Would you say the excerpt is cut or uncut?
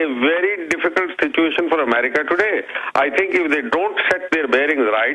cut